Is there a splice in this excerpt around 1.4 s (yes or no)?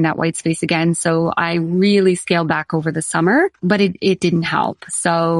no